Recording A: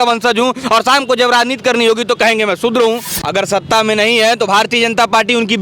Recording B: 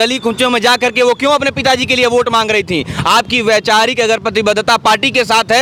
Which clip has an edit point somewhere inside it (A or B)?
A